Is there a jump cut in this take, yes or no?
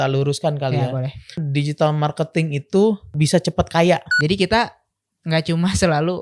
yes